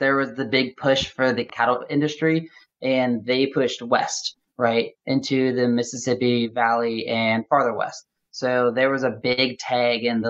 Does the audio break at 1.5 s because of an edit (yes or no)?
yes